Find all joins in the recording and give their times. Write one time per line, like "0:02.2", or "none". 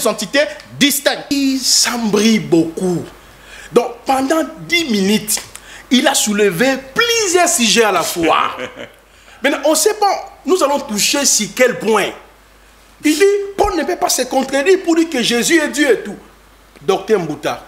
0:01.3